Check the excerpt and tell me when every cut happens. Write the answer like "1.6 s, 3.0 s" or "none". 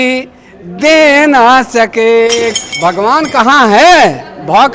2.5 s